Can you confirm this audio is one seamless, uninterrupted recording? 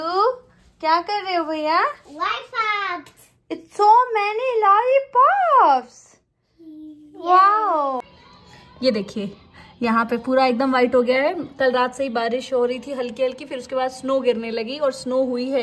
no; 1 cut; at 8.0 s

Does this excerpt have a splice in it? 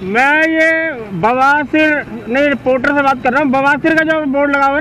no; 0 cuts

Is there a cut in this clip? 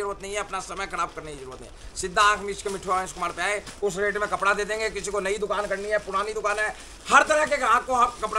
no; 0 cuts

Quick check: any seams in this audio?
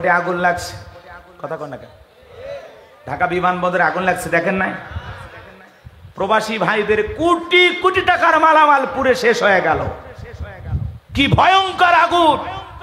no; 0 cuts

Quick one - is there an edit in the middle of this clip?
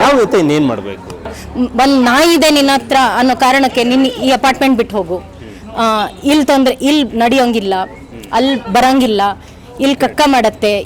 yes; 1 cut; at 1.3 s

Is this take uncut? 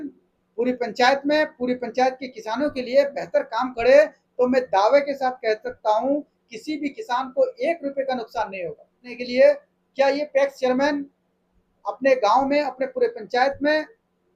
no; 1 cut; at 9.1 s

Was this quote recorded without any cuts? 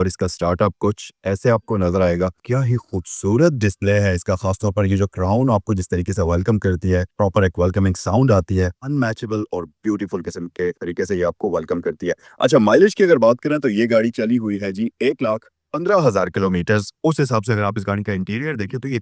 yes; 0 cuts

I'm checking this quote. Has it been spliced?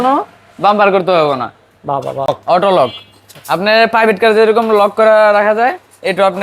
yes; 1 cut; at 2.3 s

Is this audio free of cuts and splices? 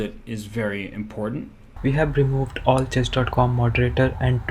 no; 1 cut; at 1.7 s

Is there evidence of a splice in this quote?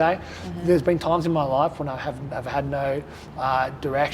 no; 0 cuts

